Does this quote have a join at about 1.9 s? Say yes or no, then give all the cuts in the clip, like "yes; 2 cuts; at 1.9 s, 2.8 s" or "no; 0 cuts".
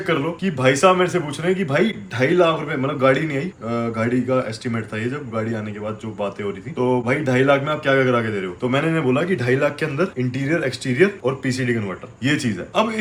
no; 0 cuts